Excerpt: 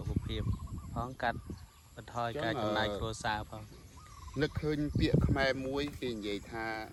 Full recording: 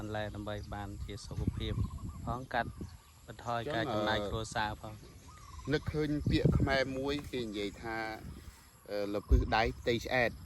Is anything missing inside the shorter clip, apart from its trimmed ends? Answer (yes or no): no